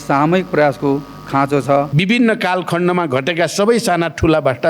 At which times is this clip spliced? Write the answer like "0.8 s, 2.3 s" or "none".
1.9 s